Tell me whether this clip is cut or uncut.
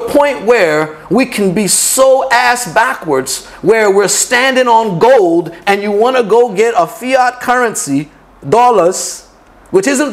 uncut